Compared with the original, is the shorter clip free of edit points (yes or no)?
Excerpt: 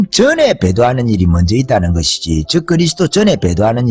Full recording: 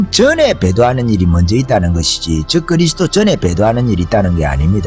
yes